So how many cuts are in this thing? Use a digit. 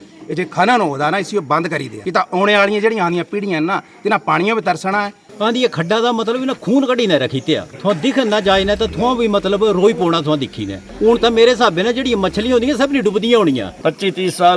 5